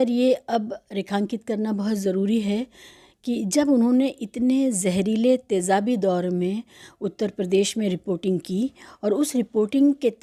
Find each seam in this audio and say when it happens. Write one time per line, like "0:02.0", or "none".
none